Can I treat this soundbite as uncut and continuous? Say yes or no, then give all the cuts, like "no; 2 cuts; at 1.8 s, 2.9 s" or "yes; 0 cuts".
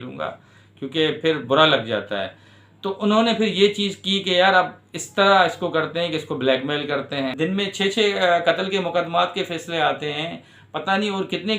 no; 1 cut; at 7.3 s